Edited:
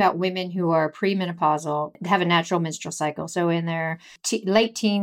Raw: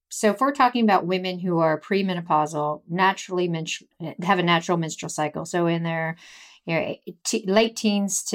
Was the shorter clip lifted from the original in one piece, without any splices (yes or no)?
no